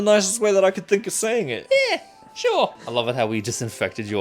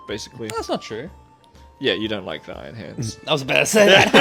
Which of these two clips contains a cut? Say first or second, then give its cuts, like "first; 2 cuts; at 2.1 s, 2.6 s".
first; 1 cut; at 2.8 s